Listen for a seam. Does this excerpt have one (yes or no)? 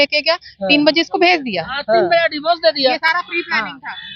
no